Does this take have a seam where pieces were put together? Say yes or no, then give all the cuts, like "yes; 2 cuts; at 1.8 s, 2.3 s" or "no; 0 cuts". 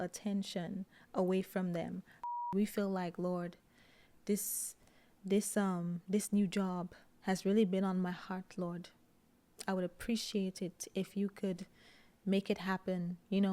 yes; 1 cut; at 2.1 s